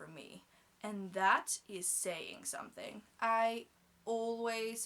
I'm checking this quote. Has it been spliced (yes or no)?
no